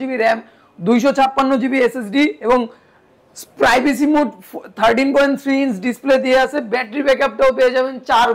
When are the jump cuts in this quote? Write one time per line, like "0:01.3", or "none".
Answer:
none